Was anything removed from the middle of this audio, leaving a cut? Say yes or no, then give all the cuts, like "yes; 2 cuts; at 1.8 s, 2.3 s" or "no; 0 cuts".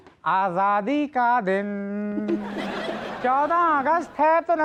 no; 0 cuts